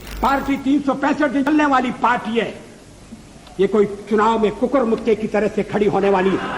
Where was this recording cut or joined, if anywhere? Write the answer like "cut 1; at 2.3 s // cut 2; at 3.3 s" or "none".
cut 1; at 1.5 s